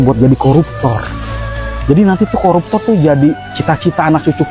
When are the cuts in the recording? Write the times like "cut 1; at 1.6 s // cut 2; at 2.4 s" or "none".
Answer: none